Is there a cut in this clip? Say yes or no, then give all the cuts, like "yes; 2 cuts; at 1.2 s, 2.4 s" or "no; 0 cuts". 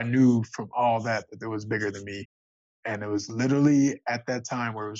yes; 1 cut; at 2.8 s